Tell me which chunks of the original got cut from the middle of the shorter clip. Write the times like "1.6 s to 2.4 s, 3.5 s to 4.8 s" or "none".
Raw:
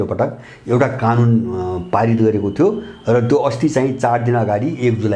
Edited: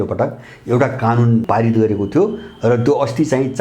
1.4 s to 1.9 s